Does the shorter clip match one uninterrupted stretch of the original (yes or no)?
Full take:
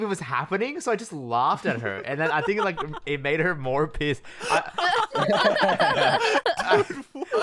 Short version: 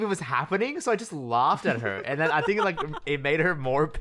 yes